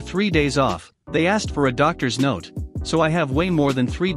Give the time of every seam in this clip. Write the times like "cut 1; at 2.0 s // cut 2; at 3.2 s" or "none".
none